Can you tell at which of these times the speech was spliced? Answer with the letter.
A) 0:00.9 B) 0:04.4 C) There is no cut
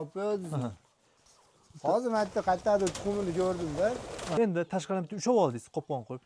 B